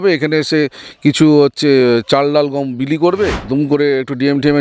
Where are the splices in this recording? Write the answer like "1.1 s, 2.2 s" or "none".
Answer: 3.4 s